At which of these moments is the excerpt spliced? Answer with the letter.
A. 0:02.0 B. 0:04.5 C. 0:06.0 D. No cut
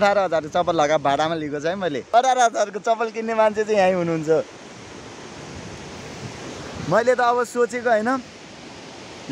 A